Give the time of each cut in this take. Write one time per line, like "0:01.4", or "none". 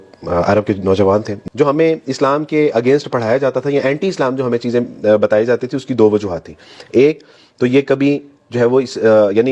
0:01.3